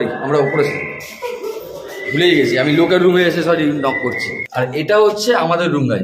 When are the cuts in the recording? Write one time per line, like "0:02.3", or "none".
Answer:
0:04.4